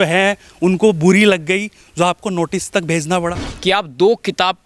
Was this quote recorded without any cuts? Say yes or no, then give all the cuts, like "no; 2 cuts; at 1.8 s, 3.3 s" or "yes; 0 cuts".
no; 1 cut; at 3.5 s